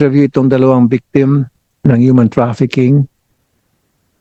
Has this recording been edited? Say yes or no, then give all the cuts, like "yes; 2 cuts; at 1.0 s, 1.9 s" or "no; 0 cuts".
no; 0 cuts